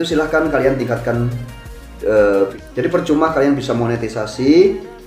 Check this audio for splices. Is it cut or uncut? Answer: cut